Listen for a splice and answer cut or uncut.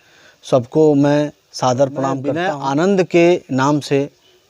cut